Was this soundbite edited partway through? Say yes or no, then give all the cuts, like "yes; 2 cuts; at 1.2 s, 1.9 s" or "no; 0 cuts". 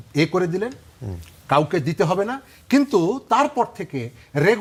no; 0 cuts